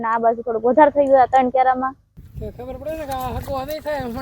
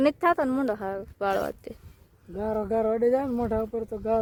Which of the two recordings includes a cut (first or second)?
first